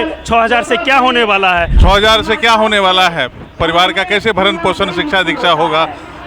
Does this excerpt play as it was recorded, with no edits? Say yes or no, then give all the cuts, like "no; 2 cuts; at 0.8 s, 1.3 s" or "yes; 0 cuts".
no; 1 cut; at 1.8 s